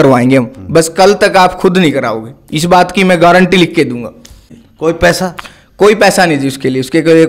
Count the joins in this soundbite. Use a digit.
1